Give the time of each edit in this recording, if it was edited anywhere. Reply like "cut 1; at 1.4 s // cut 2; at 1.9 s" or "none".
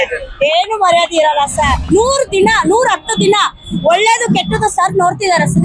cut 1; at 1.8 s